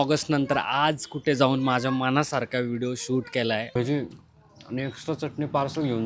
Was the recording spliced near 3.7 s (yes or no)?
yes